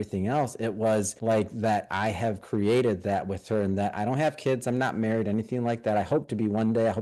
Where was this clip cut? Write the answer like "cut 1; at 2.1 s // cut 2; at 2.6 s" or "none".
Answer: cut 1; at 1.1 s